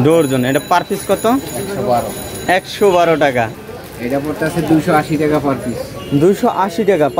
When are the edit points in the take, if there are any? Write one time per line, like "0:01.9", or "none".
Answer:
0:03.7